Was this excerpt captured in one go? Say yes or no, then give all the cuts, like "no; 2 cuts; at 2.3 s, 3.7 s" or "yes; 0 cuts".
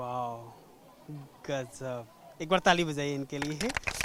yes; 0 cuts